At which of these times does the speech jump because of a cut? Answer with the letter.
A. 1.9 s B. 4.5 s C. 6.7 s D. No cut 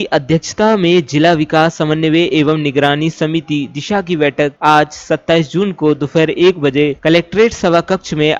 D